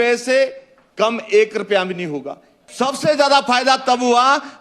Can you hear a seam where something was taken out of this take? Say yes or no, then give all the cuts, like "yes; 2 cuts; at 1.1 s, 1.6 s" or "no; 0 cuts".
yes; 1 cut; at 2.6 s